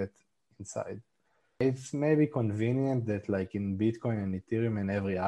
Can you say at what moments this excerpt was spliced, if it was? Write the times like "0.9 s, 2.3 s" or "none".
1.6 s